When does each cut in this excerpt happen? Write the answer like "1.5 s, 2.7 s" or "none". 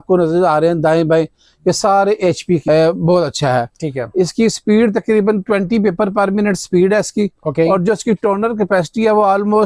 2.6 s